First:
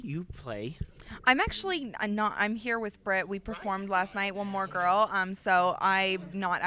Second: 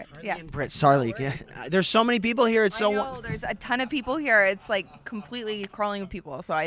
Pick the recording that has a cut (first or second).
second